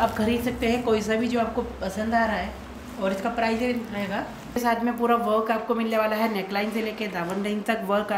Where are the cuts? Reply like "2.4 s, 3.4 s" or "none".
4.6 s